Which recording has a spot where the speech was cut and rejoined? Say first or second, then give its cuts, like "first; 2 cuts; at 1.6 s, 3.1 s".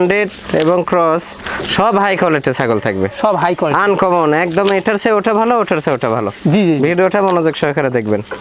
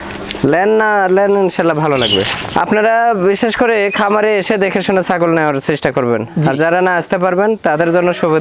second; 1 cut; at 2.3 s